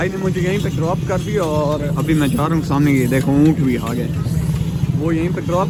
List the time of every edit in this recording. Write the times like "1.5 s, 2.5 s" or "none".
none